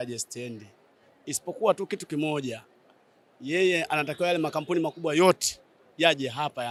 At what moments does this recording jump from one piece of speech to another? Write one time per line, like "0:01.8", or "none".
none